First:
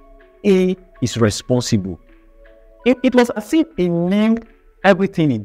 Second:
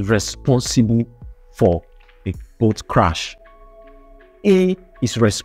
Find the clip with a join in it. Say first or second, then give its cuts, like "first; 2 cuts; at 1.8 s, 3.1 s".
first; 1 cut; at 3.4 s